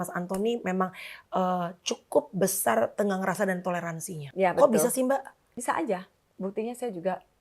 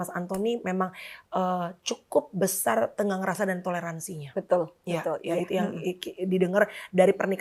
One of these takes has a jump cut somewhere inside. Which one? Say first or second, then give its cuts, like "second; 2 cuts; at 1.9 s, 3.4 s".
first; 2 cuts; at 4.2 s, 5.5 s